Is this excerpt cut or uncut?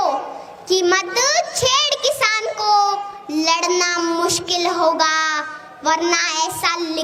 uncut